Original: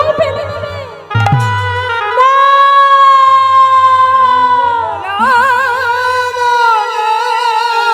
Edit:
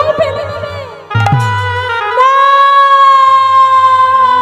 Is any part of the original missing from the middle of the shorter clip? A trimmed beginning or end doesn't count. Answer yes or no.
no